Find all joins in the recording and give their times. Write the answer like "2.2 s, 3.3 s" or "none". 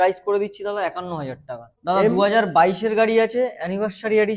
1.7 s